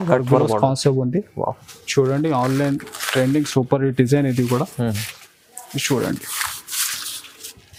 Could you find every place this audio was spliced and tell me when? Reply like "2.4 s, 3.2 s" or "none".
none